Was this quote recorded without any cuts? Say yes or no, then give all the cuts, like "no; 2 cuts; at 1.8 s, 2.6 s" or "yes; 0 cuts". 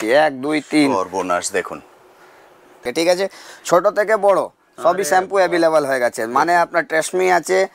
no; 1 cut; at 2.8 s